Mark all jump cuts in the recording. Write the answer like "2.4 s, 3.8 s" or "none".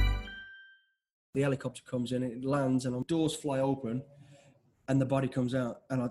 1.3 s, 3.0 s